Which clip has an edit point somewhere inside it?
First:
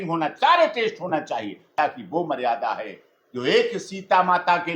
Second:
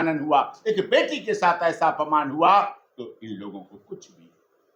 first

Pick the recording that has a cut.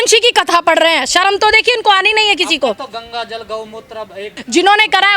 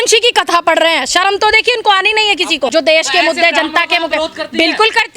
second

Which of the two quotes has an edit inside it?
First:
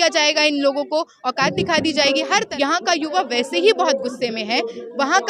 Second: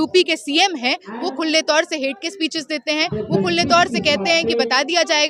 first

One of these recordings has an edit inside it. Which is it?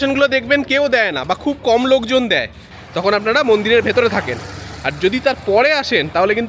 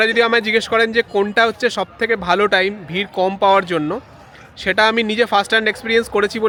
first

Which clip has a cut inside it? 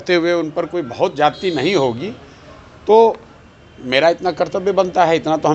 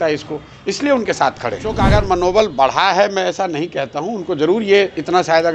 second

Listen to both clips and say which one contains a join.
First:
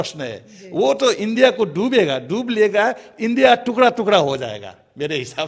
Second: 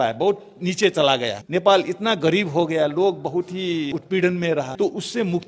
second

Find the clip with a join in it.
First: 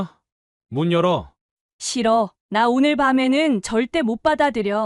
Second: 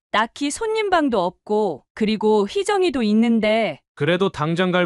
second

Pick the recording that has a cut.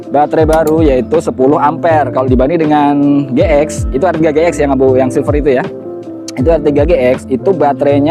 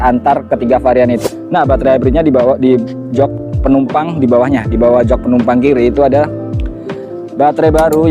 second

